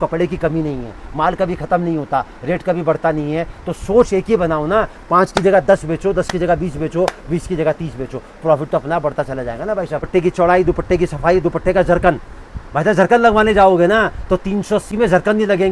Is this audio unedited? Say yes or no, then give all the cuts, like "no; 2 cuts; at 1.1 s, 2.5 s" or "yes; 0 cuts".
no; 1 cut; at 10.0 s